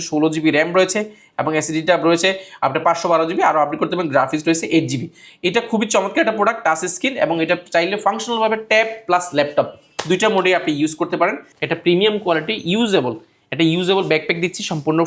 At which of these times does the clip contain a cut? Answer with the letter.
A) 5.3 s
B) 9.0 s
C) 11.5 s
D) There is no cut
C